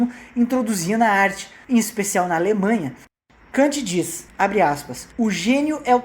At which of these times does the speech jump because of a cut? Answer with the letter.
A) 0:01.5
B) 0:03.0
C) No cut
B